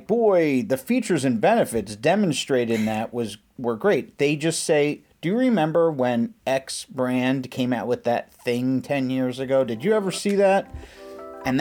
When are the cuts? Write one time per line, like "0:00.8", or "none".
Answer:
none

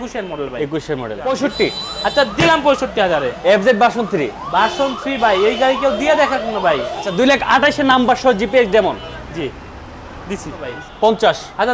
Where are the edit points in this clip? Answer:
0:01.2
0:07.0
0:10.7

